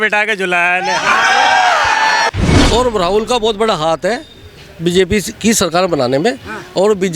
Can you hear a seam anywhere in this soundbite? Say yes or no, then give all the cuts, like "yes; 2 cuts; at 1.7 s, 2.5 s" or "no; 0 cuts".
yes; 1 cut; at 2.3 s